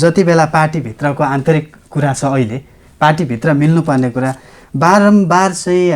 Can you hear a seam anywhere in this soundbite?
no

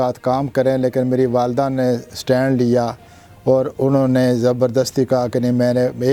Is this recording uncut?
yes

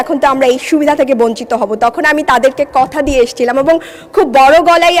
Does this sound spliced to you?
no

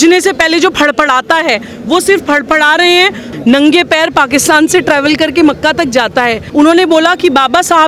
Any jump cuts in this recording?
yes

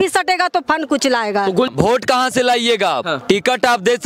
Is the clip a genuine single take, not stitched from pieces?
no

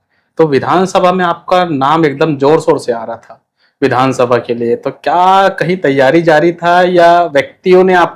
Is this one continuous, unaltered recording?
yes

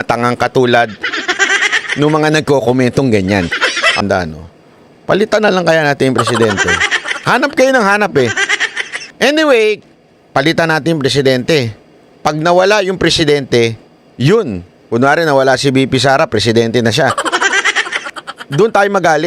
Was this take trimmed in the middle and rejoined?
yes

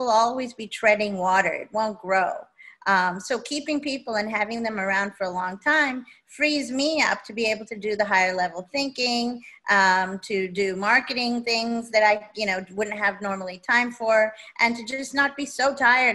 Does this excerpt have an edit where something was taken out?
no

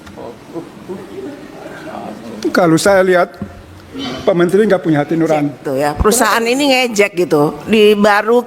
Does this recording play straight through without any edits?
no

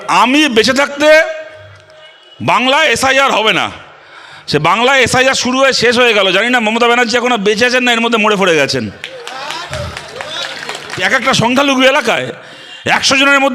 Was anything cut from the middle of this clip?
yes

